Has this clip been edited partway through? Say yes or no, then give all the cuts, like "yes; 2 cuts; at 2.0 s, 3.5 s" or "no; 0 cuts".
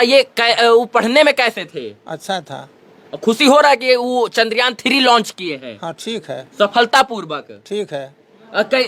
no; 0 cuts